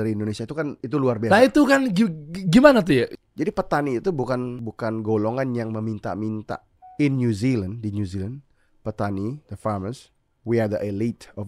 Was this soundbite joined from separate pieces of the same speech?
yes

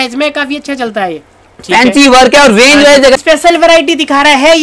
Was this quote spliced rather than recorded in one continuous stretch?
yes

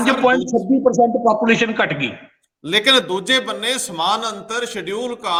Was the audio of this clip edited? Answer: no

